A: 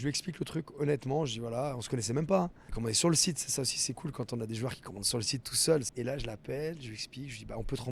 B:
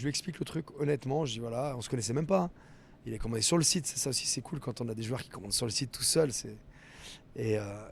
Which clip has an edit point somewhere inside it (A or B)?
A